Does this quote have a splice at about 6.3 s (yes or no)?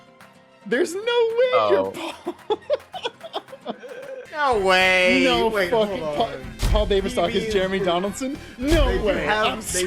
no